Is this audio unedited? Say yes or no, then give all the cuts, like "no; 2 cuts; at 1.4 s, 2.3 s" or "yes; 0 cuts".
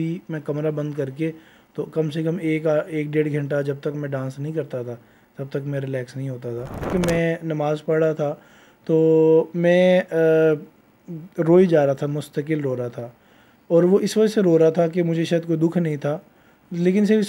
no; 1 cut; at 6.9 s